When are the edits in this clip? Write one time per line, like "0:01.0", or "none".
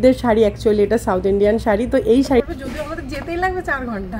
0:02.4